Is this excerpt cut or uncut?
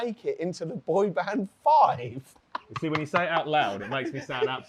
uncut